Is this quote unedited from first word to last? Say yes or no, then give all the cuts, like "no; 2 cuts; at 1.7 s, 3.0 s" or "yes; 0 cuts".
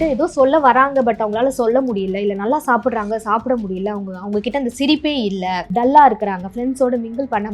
no; 1 cut; at 5.7 s